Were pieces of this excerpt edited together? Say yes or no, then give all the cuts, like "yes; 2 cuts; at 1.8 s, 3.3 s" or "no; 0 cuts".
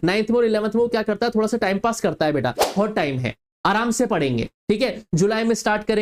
yes; 1 cut; at 2.8 s